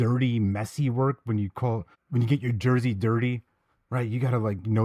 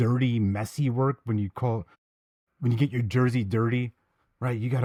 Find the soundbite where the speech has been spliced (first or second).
first